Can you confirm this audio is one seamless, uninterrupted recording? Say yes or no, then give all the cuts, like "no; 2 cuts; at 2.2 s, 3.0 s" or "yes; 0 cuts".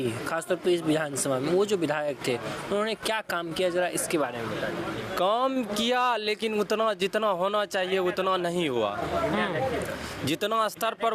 yes; 0 cuts